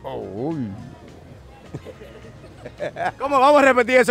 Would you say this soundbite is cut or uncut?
uncut